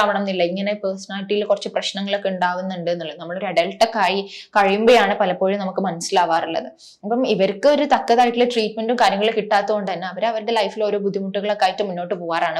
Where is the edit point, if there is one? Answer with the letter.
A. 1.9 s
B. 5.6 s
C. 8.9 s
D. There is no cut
D